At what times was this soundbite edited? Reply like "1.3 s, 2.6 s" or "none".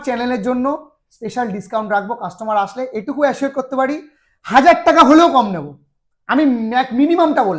none